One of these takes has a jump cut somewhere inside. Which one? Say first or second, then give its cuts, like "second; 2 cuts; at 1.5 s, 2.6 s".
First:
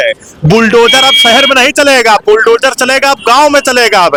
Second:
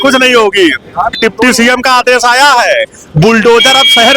second; 1 cut; at 1.2 s